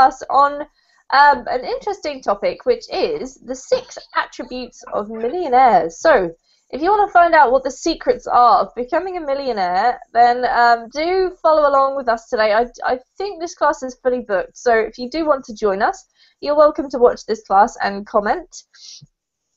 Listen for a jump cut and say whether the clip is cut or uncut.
uncut